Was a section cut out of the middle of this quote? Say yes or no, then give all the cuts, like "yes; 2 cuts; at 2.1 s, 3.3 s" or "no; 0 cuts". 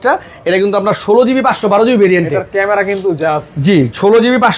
no; 0 cuts